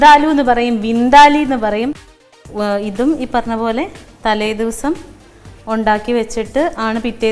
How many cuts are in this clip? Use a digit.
1